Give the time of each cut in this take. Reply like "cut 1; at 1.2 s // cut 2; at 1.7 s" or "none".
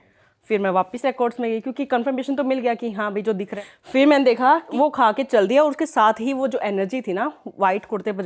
cut 1; at 3.5 s // cut 2; at 4.7 s